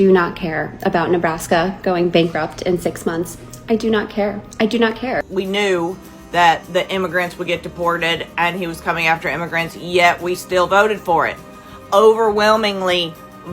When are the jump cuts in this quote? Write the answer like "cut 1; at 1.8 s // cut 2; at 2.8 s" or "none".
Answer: cut 1; at 5.3 s